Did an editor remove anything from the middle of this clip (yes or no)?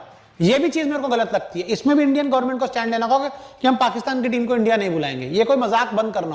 no